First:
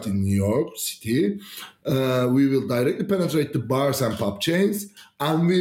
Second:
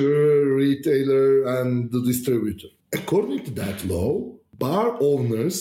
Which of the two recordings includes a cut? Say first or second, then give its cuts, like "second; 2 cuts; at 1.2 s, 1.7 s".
second; 2 cuts; at 2.7 s, 4.5 s